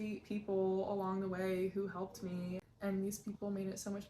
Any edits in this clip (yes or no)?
yes